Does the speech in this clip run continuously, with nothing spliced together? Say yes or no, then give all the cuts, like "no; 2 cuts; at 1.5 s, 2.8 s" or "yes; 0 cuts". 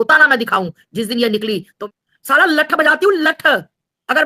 no; 1 cut; at 1.8 s